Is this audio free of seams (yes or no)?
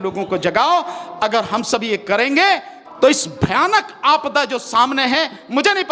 no